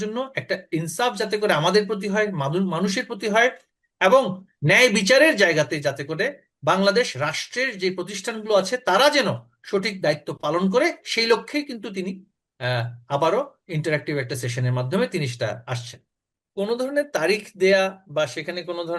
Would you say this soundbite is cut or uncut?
cut